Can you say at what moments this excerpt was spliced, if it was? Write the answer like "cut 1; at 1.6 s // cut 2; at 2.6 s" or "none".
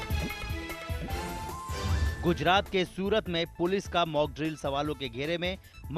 cut 1; at 1.8 s